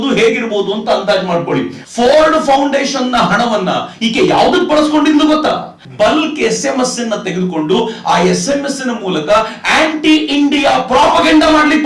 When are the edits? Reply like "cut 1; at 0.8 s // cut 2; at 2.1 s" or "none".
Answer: cut 1; at 1.8 s // cut 2; at 5.8 s